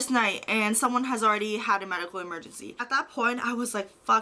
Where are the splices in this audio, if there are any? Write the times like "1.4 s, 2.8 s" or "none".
2.7 s

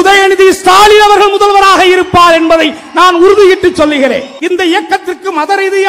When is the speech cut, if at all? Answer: 4.3 s

